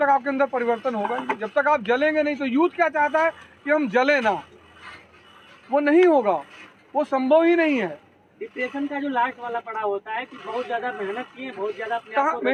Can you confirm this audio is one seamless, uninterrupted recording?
yes; 0 cuts

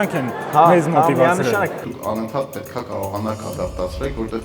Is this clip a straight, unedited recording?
no; 1 cut; at 1.9 s

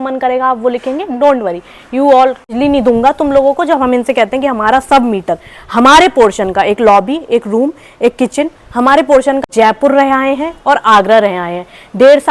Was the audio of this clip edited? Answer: yes; 2 cuts; at 2.5 s, 9.5 s

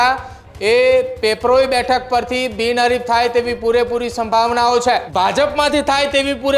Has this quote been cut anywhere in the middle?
yes; 1 cut; at 5.1 s

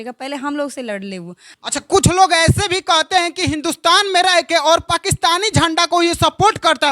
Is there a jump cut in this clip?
yes; 1 cut; at 1.5 s

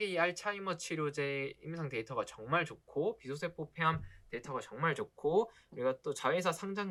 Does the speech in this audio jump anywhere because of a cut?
no; 0 cuts

